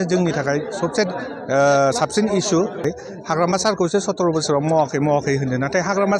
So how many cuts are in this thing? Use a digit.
1